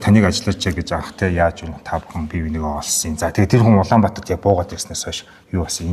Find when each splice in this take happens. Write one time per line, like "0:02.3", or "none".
none